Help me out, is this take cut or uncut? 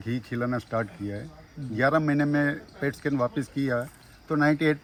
uncut